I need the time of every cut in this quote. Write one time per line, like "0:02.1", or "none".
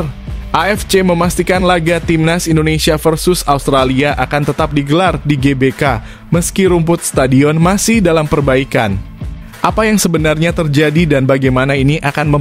none